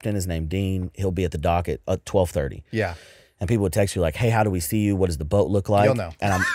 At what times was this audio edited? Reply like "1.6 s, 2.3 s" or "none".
none